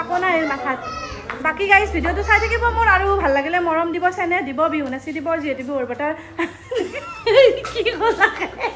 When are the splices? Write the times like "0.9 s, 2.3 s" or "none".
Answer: none